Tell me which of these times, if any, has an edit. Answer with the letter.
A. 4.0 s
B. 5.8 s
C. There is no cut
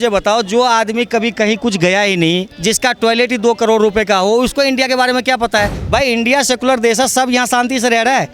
B